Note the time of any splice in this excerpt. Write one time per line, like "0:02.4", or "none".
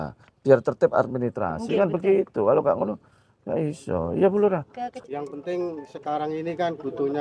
0:05.0